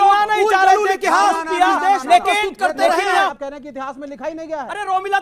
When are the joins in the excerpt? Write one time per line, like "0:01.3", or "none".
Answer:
0:03.3